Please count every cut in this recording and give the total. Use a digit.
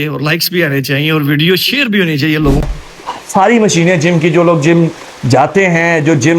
1